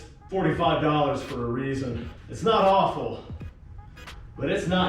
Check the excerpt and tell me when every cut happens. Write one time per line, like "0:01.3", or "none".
0:02.3